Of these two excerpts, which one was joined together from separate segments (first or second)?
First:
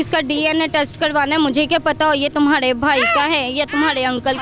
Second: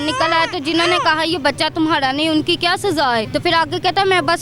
second